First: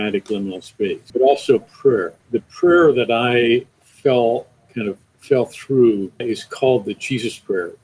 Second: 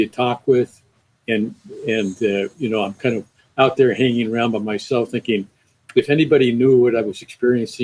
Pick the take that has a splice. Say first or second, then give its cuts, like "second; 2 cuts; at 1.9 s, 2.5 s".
first; 4 cuts; at 1.0 s, 2.2 s, 3.8 s, 6.2 s